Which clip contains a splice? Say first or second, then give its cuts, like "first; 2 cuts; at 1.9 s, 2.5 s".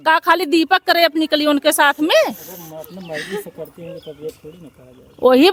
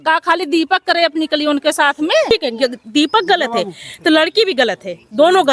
second; 1 cut; at 2.3 s